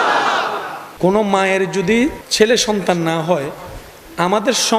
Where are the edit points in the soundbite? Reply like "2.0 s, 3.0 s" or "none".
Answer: 0.9 s, 2.2 s